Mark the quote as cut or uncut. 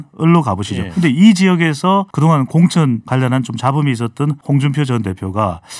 cut